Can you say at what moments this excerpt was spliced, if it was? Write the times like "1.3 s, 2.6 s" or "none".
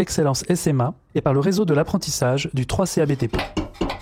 none